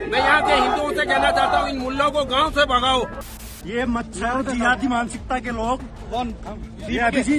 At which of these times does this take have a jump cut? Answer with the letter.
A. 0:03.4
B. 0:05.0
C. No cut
A